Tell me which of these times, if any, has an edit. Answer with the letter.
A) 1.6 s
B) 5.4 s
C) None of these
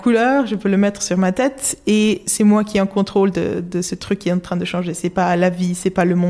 C